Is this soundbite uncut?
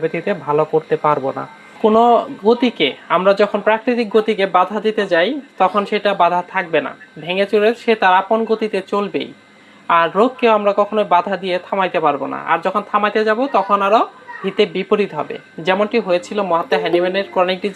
no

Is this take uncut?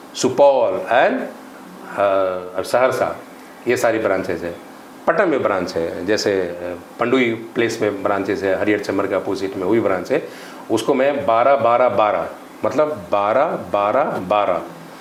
yes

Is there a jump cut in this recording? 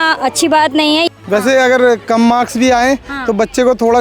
yes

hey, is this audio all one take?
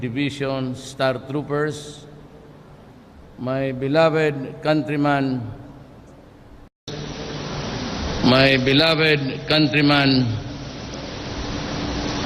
no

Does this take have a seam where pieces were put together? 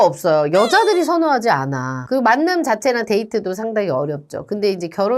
yes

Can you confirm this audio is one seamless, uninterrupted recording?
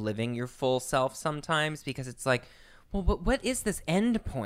yes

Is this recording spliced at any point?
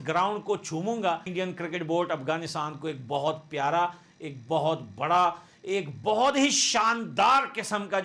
yes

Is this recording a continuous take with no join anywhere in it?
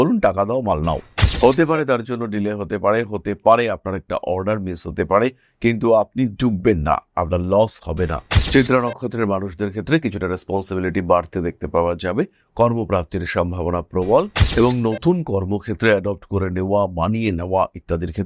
no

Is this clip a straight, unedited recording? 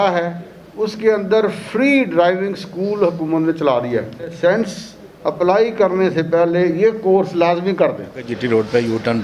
no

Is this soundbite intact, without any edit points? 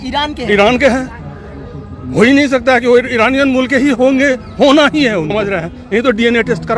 no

